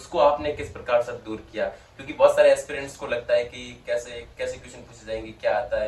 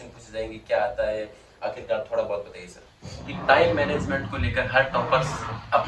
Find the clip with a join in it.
second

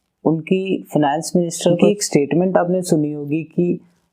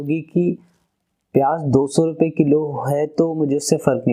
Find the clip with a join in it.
first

